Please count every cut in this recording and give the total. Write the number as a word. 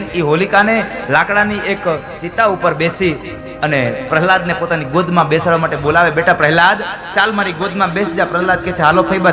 zero